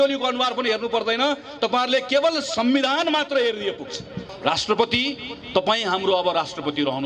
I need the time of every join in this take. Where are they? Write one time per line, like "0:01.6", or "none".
0:04.3